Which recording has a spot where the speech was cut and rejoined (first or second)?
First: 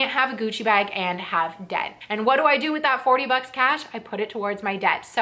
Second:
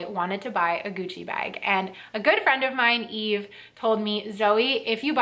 first